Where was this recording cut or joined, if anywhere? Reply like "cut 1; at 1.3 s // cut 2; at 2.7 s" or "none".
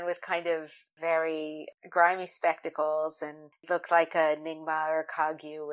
cut 1; at 0.9 s // cut 2; at 1.7 s // cut 3; at 3.5 s